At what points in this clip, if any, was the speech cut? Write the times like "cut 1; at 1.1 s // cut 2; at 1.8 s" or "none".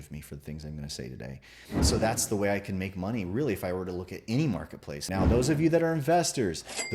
cut 1; at 1.5 s // cut 2; at 5.0 s